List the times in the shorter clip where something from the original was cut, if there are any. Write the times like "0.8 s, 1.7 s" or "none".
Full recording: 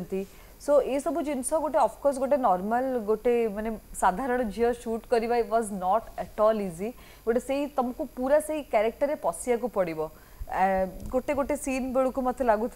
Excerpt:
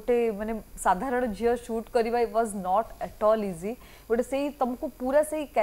none